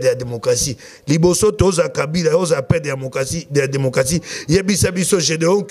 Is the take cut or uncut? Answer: uncut